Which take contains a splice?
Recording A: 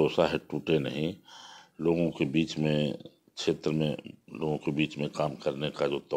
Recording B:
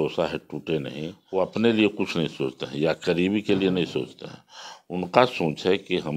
B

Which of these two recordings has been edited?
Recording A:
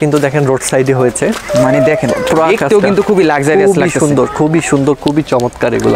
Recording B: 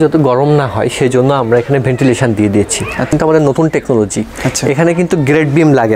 B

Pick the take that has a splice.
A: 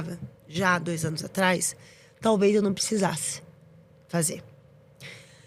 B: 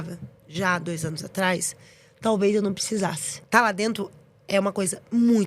B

